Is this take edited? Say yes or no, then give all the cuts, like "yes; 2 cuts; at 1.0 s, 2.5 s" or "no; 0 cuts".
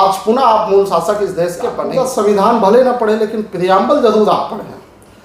yes; 1 cut; at 1.7 s